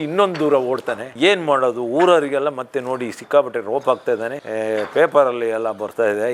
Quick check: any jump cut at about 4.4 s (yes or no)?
no